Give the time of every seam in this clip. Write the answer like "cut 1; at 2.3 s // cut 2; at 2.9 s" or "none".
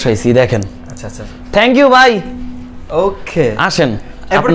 none